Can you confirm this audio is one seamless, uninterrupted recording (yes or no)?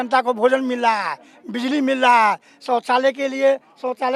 yes